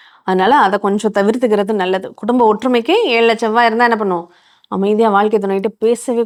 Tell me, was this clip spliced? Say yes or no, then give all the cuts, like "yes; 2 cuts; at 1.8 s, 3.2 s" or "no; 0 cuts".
no; 0 cuts